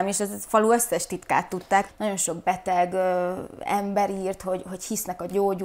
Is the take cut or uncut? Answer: cut